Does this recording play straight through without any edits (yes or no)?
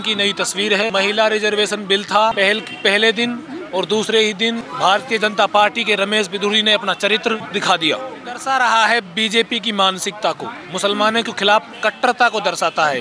no